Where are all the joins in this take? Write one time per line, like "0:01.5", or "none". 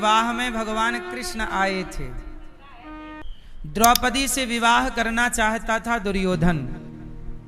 0:03.2